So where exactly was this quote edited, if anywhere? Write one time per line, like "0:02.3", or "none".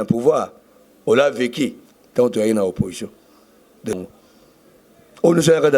0:03.9

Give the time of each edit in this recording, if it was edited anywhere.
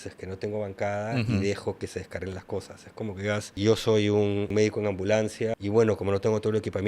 0:03.5
0:04.5
0:05.5

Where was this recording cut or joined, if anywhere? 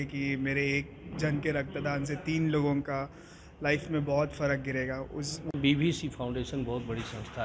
0:05.5

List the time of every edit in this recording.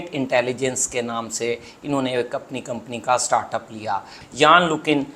0:04.2

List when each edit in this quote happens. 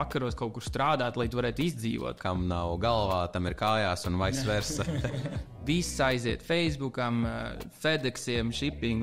0:02.2
0:05.5

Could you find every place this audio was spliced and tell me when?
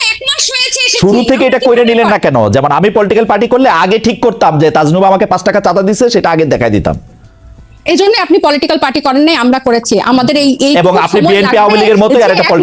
none

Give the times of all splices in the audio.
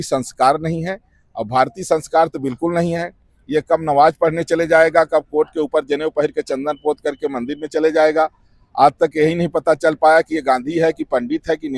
none

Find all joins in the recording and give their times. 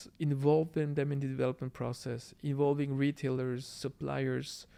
none

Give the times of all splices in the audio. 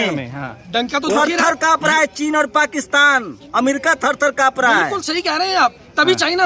none

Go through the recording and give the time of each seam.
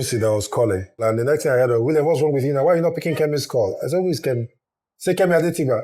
0:01.0

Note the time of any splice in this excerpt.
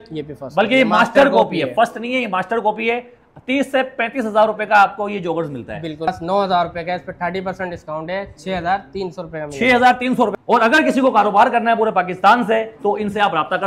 0:06.1
0:10.4

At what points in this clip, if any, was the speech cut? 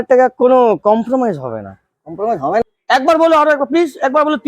0:02.6

